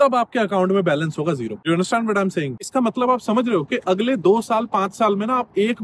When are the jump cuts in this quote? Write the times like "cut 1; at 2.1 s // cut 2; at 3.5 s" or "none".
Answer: cut 1; at 2.5 s

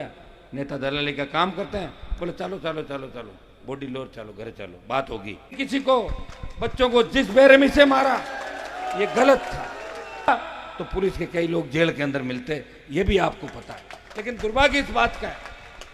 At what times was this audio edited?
cut 1; at 5.6 s // cut 2; at 10.3 s

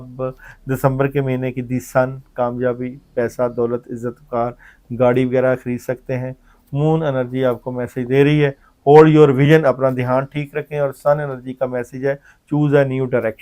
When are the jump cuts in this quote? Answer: none

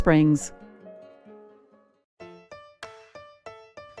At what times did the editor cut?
cut 1; at 2.2 s

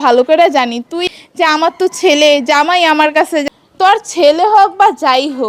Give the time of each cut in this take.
cut 1; at 1.0 s // cut 2; at 3.4 s

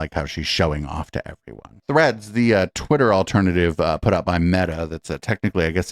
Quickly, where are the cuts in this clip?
cut 1; at 1.8 s

